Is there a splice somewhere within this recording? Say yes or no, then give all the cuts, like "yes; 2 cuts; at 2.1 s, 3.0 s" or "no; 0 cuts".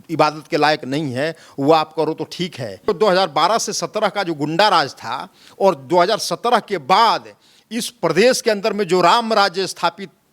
yes; 1 cut; at 2.9 s